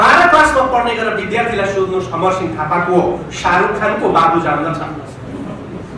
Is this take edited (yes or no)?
no